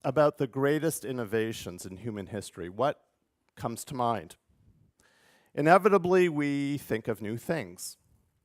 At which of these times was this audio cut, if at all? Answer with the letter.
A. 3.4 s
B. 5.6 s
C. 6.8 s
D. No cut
C